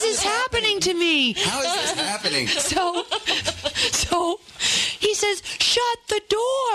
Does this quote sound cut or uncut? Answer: uncut